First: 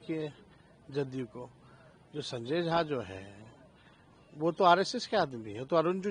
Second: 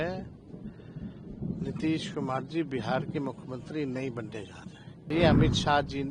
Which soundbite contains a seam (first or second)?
second